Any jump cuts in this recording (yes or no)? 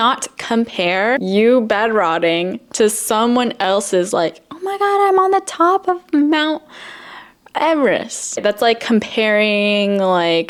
no